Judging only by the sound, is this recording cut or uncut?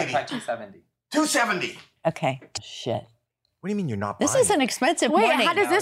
cut